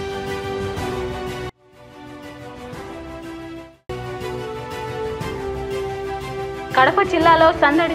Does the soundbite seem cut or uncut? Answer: cut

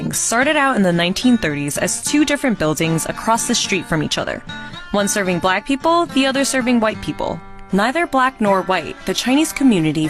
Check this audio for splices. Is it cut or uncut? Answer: uncut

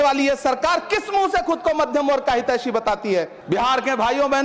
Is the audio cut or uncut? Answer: cut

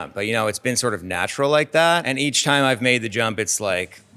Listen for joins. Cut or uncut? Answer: cut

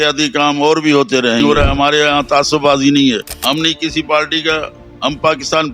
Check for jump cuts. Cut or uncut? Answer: cut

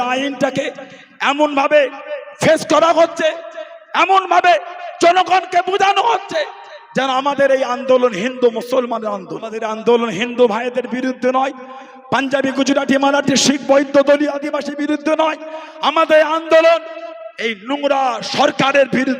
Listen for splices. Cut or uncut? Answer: cut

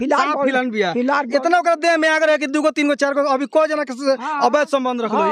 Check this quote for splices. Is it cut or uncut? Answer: uncut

